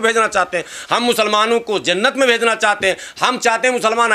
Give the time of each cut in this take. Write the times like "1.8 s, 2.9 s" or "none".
none